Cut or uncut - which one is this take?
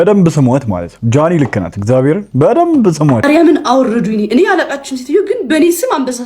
cut